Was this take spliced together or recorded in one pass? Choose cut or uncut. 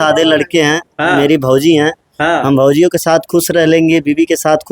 uncut